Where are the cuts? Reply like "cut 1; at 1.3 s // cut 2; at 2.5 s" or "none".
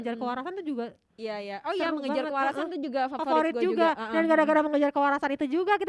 none